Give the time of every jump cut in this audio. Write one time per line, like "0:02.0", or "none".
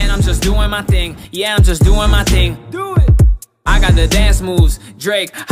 0:01.5